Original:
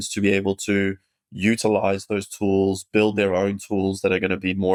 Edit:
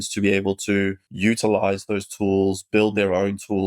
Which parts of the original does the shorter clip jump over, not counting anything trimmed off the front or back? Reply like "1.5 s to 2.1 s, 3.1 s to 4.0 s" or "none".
1.0 s to 1.3 s